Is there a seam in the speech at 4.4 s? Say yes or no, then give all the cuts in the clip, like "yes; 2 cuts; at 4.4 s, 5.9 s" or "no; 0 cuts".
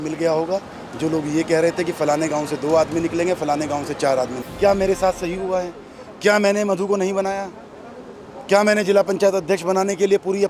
yes; 1 cut; at 4.4 s